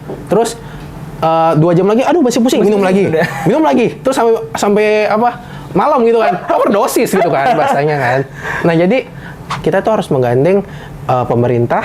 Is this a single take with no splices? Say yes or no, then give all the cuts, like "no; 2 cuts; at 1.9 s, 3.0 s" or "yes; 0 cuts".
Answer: no; 1 cut; at 9.6 s